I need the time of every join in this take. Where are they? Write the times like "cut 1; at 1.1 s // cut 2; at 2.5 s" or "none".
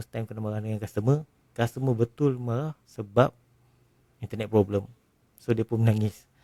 none